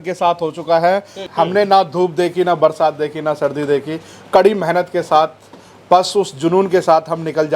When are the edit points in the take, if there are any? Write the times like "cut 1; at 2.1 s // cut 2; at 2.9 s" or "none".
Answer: cut 1; at 1.2 s